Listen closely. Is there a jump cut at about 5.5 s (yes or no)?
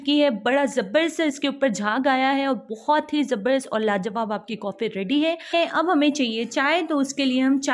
yes